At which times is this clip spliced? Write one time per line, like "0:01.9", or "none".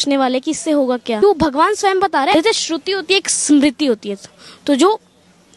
0:01.2
0:02.3